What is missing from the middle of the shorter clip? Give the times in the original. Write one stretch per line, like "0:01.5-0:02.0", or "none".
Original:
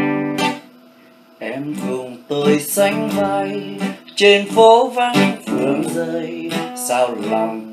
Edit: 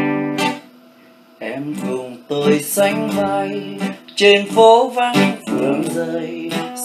none